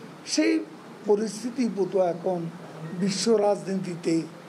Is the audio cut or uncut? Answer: uncut